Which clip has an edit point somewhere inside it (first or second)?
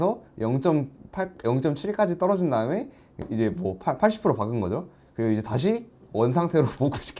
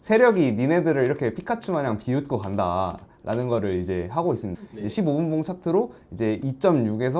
second